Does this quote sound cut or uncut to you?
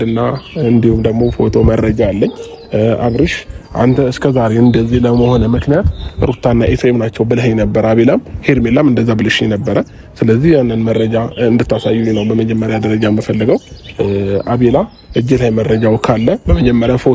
uncut